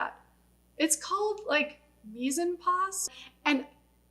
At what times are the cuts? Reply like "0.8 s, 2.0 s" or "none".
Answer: 3.1 s